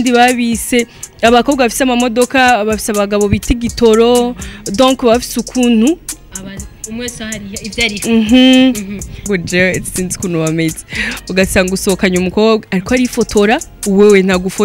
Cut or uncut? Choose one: cut